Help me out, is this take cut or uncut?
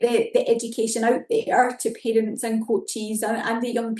uncut